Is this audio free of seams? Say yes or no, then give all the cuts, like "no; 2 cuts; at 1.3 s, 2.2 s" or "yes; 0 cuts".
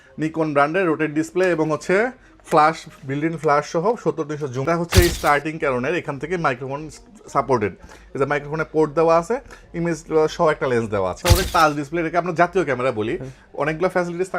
no; 2 cuts; at 4.6 s, 11.2 s